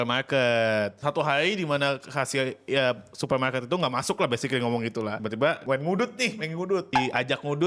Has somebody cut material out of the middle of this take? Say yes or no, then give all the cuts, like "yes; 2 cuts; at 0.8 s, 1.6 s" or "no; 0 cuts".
yes; 3 cuts; at 1.0 s, 5.4 s, 6.9 s